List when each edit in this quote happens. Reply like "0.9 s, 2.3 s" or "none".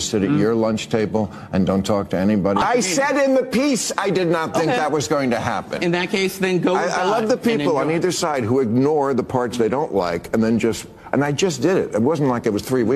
2.6 s